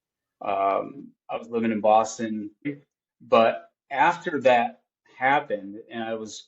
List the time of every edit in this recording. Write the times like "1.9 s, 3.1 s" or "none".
2.8 s